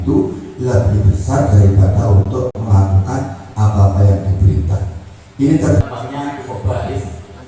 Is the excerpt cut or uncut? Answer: cut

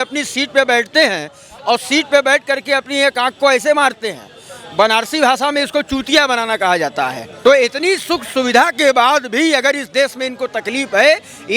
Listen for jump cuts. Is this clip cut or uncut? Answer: cut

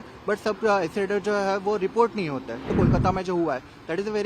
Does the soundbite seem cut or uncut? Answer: cut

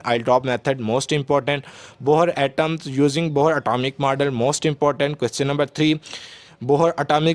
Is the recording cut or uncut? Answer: uncut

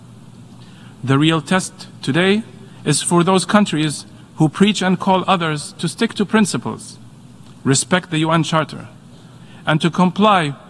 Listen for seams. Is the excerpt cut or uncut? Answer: uncut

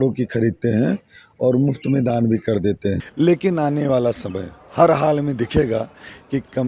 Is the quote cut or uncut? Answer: cut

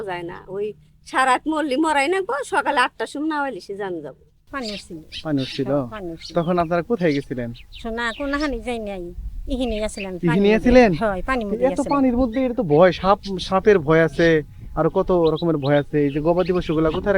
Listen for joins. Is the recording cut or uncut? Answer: cut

